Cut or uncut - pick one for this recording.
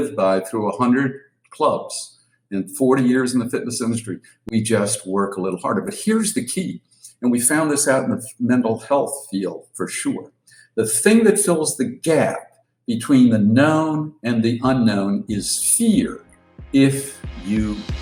uncut